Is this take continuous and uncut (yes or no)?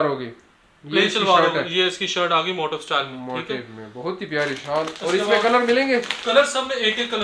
yes